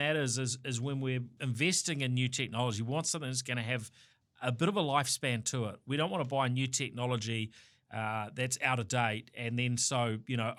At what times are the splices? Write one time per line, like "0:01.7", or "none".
none